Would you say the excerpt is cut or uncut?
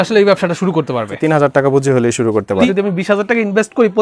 cut